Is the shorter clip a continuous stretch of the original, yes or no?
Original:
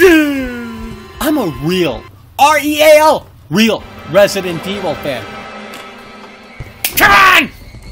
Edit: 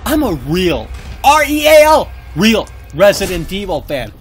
yes